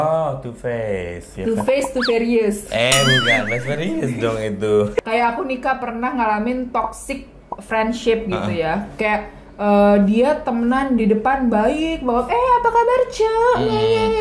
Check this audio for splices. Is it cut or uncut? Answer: cut